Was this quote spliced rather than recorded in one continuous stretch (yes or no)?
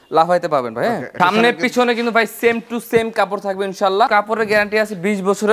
yes